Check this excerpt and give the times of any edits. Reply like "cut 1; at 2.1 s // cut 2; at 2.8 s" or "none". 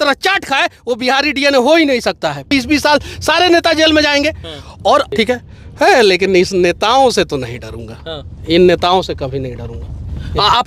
cut 1; at 2.5 s // cut 2; at 5.1 s